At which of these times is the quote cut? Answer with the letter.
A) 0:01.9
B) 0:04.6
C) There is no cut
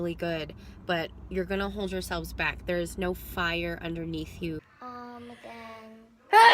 B